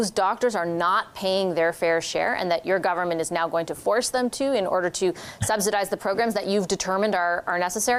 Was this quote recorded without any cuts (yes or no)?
yes